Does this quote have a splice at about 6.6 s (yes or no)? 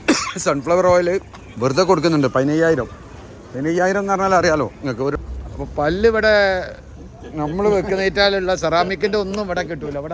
no